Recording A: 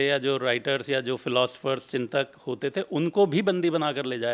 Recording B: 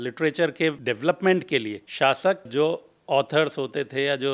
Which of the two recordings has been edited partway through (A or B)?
B